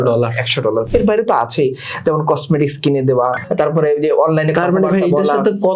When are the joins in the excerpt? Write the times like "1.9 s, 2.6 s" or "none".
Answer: 0.9 s, 3.3 s